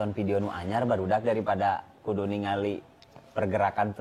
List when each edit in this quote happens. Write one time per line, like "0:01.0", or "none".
none